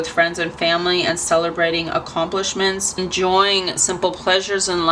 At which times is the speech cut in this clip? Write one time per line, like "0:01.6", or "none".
none